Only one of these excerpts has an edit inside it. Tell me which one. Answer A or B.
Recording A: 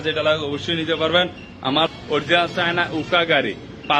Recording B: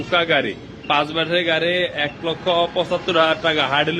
A